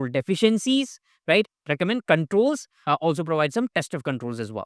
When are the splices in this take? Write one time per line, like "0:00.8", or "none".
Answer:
0:01.6
0:02.7